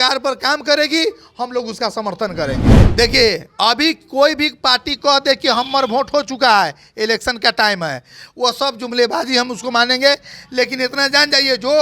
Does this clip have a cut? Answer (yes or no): yes